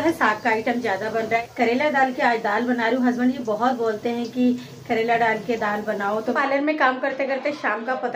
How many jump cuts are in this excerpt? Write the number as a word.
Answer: two